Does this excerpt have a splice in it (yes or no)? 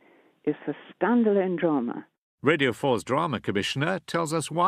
no